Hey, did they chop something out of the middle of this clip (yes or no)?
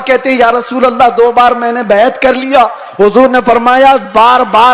no